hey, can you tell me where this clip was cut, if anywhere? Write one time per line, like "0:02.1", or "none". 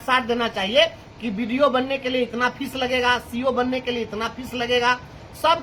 none